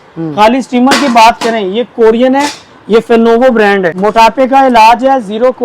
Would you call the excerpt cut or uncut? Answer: cut